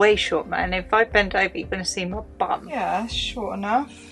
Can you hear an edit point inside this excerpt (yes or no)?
yes